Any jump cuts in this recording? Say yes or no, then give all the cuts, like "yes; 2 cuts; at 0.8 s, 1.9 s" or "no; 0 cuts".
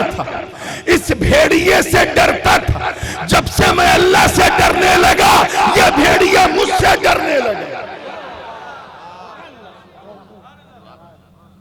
no; 0 cuts